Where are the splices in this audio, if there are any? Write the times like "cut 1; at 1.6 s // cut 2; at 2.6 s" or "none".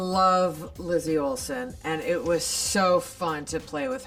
none